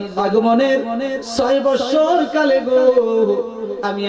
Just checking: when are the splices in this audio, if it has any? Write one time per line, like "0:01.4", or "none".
none

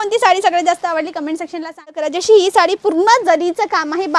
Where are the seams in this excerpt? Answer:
0:02.1

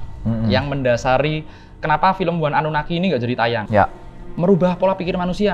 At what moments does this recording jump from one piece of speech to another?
0:03.6

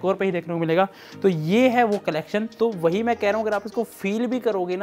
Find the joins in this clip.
0:02.5

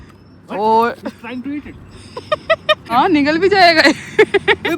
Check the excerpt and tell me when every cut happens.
0:02.8

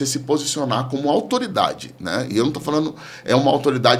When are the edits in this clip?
none

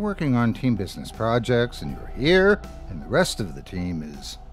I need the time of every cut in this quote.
none

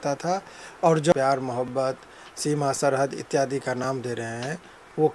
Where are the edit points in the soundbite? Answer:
0:01.1

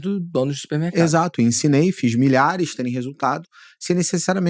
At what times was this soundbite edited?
none

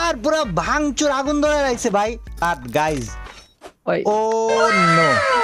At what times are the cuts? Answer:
0:02.4

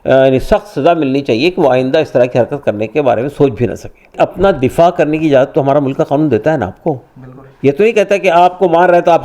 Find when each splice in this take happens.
0:04.1

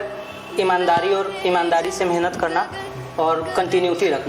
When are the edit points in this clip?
none

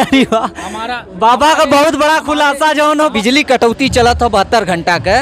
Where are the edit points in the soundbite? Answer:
0:03.1

